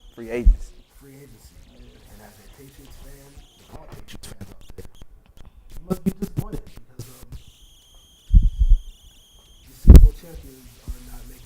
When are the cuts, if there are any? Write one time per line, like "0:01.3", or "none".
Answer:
0:05.9